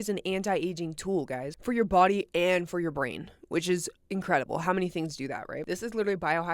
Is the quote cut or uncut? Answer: cut